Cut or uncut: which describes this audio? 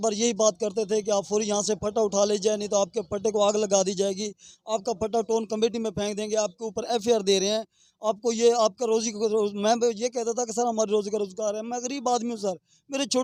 uncut